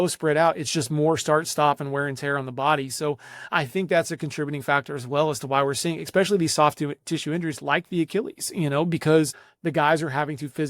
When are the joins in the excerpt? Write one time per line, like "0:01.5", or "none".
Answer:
0:09.5